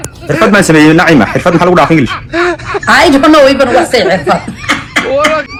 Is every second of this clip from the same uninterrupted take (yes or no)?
yes